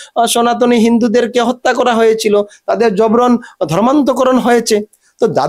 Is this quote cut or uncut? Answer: uncut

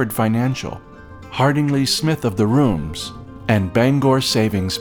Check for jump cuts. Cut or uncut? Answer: uncut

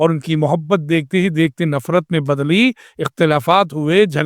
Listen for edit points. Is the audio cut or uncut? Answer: uncut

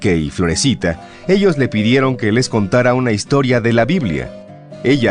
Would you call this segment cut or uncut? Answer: uncut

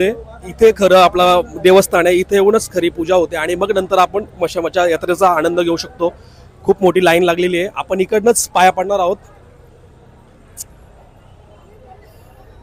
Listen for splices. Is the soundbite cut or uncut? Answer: uncut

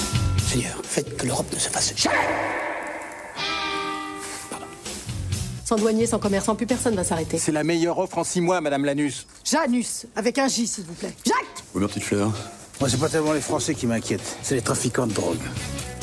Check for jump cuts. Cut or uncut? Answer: cut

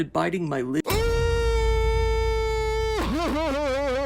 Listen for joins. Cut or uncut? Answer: uncut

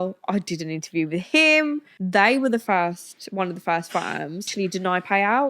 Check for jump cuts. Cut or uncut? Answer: cut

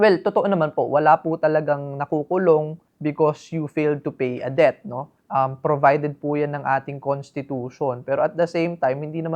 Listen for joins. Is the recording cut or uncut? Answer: uncut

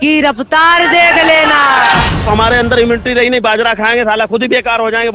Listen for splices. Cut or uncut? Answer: cut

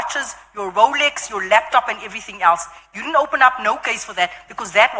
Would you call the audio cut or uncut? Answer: uncut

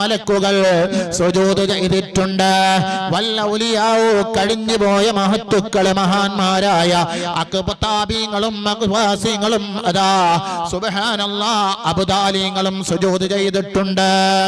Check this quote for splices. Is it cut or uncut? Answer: uncut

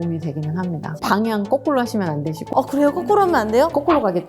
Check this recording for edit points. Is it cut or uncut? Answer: cut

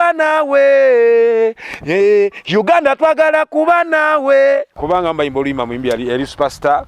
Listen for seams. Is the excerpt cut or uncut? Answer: cut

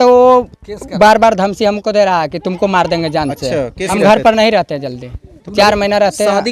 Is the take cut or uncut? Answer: cut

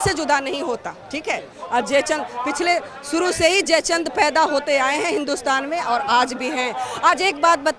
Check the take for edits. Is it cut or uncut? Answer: uncut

